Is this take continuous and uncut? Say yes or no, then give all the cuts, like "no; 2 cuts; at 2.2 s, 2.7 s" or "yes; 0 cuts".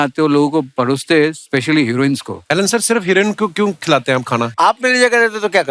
no; 2 cuts; at 2.4 s, 4.5 s